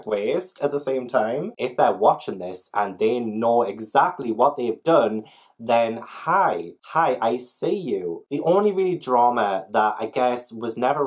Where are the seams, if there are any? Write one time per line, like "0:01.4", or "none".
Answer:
0:01.5
0:08.2